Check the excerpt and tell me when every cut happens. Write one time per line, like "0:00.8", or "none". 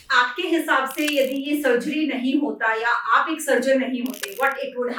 none